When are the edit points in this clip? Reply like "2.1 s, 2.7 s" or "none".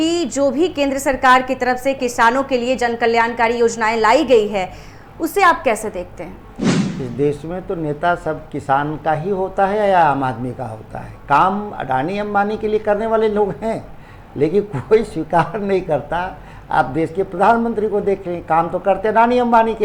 none